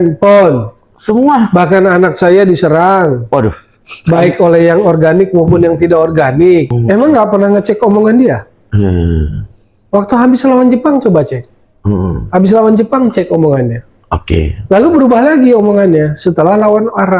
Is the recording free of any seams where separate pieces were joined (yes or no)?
no